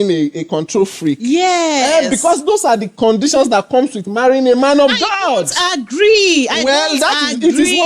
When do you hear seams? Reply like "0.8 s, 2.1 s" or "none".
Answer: none